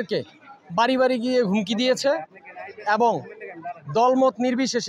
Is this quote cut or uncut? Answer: uncut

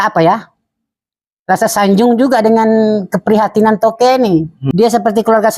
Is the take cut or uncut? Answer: cut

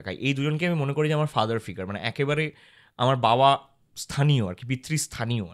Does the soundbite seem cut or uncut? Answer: uncut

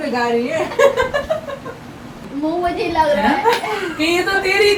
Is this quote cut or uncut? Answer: uncut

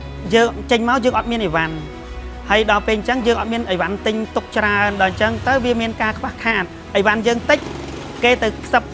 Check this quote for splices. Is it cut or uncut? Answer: cut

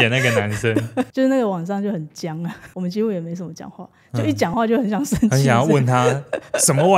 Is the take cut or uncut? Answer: cut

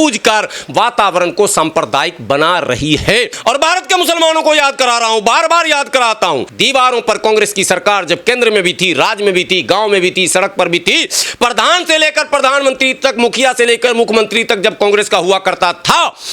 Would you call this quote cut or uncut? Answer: cut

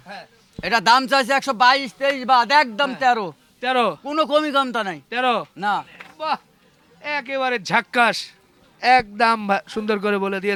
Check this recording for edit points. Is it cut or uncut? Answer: uncut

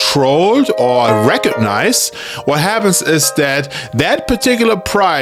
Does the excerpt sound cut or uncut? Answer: uncut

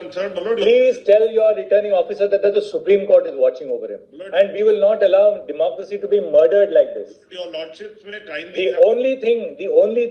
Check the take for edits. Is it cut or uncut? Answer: cut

